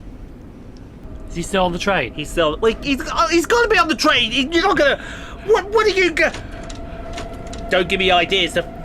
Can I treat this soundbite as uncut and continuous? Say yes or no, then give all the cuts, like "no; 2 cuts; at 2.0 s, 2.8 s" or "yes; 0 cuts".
no; 1 cut; at 1.0 s